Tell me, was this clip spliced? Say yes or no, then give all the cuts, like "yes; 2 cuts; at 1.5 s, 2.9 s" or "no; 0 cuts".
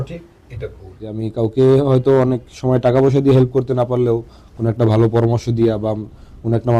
yes; 1 cut; at 1.2 s